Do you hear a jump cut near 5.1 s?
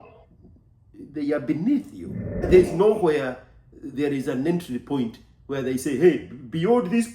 no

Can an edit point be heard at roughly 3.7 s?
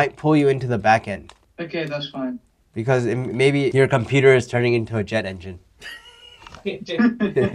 yes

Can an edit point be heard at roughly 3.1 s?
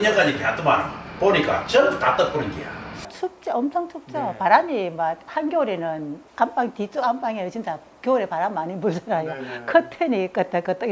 yes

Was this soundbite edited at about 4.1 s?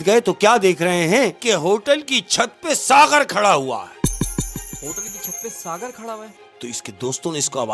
no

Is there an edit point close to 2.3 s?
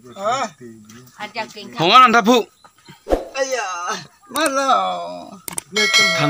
no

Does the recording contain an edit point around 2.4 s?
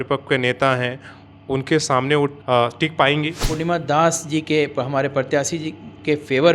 yes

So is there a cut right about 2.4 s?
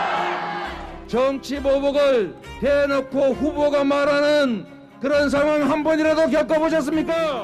yes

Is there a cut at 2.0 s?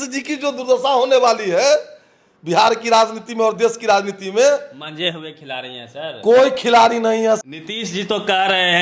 no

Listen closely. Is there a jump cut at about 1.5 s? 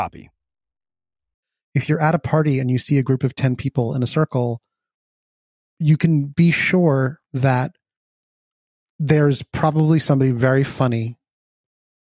yes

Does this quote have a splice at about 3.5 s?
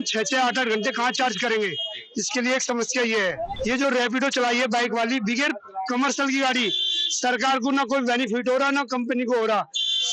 yes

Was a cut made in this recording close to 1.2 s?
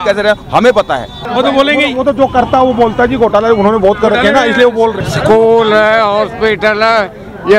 yes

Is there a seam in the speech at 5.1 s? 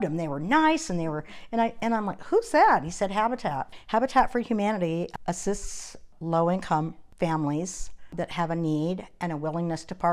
yes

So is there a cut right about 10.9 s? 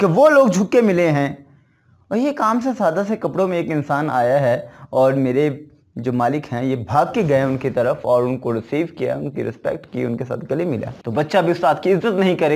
yes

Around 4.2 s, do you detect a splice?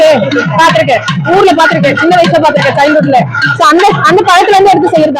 no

